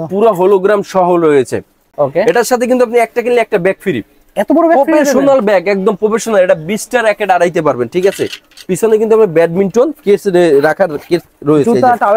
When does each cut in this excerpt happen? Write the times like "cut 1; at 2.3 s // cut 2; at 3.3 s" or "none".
cut 1; at 1.8 s